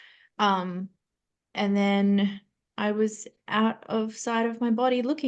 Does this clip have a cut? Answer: no; 0 cuts

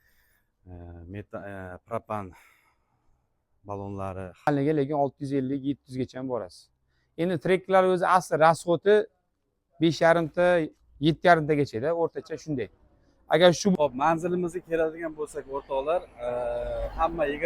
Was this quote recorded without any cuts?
no; 2 cuts; at 4.5 s, 13.7 s

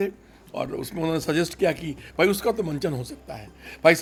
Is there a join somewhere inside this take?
no; 0 cuts

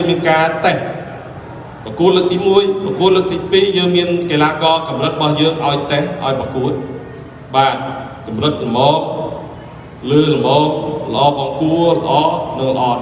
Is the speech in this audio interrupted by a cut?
no; 0 cuts

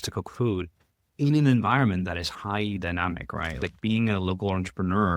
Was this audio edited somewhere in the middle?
yes; 1 cut; at 3.7 s

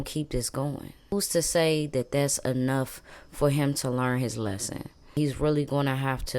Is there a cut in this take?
yes; 2 cuts; at 1.1 s, 5.2 s

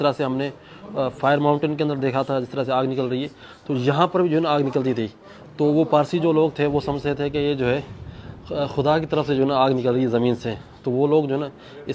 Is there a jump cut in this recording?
no; 0 cuts

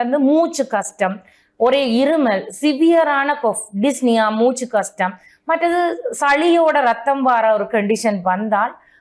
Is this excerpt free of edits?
yes; 0 cuts

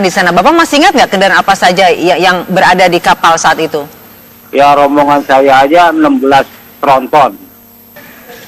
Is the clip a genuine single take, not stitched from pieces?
no; 1 cut; at 2.8 s

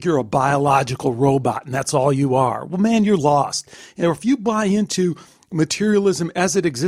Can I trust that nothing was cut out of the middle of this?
yes; 0 cuts

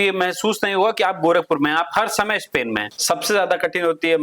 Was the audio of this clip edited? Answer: yes; 1 cut; at 2.9 s

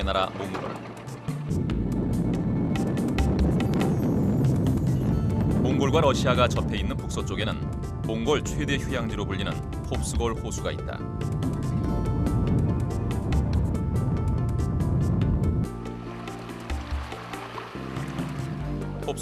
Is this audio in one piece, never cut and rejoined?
no; 1 cut; at 7.7 s

